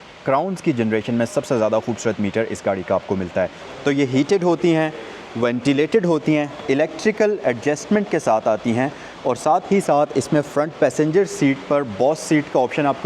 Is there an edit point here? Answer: yes; 1 cut; at 3.6 s

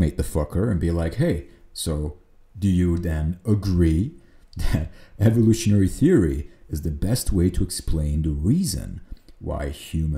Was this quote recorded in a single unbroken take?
yes; 0 cuts

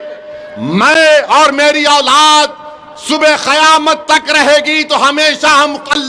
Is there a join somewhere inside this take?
no; 0 cuts

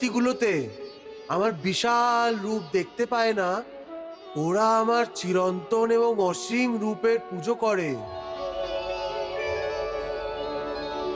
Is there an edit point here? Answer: no; 0 cuts

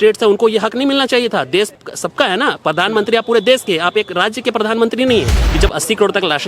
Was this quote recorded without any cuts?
no; 2 cuts; at 1.8 s, 5.4 s

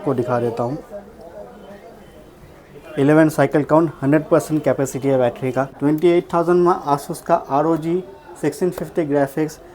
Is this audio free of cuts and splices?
no; 1 cut; at 5.7 s

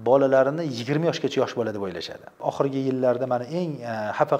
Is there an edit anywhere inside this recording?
yes; 1 cut; at 2.3 s

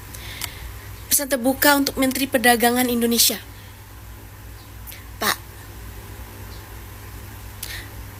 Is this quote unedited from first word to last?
yes; 0 cuts

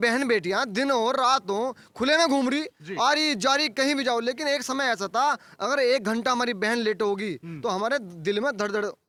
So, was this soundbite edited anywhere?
no; 0 cuts

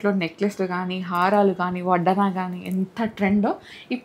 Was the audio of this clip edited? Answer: no; 0 cuts

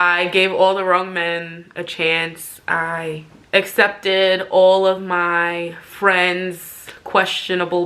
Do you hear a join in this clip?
no; 0 cuts

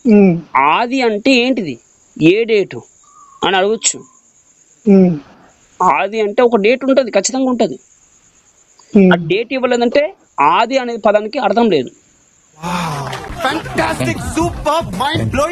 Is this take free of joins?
yes; 0 cuts

